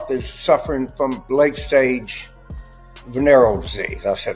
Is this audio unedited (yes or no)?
yes